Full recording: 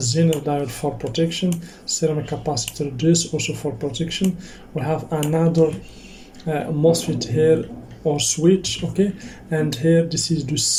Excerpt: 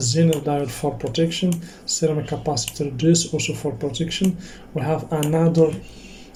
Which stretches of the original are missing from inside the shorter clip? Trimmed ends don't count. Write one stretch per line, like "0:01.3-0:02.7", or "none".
none